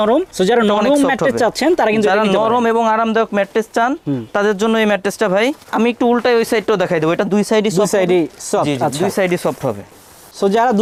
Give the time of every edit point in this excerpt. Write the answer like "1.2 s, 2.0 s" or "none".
none